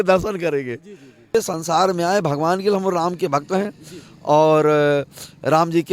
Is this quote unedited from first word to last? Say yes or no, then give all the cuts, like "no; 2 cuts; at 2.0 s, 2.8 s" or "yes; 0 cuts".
no; 1 cut; at 1.3 s